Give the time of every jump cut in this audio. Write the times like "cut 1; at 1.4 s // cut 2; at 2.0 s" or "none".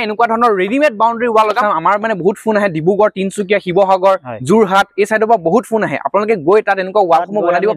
cut 1; at 1.6 s

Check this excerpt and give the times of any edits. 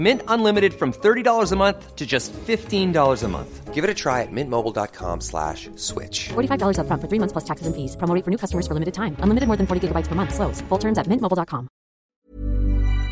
cut 1; at 12.1 s

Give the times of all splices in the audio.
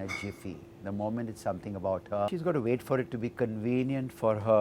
cut 1; at 2.3 s

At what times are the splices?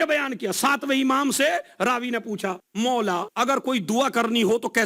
cut 1; at 2.6 s // cut 2; at 3.3 s

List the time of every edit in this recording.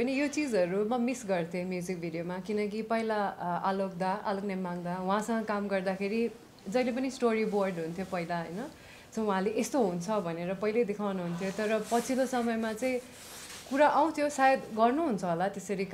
none

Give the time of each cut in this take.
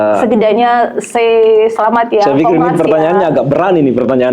none

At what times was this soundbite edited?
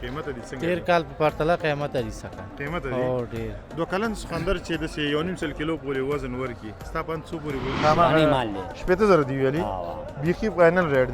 cut 1; at 7.7 s

